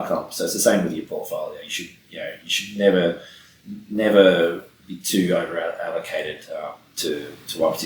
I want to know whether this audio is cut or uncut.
uncut